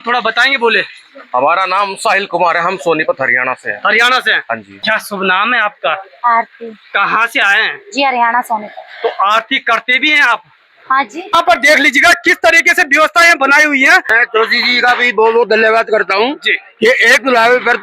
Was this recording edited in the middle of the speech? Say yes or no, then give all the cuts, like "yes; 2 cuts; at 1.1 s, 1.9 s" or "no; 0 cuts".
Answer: yes; 3 cuts; at 4.7 s, 11.3 s, 14.0 s